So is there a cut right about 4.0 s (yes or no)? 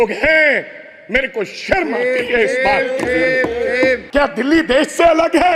yes